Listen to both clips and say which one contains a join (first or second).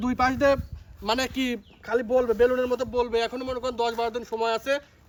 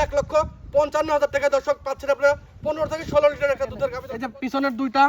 second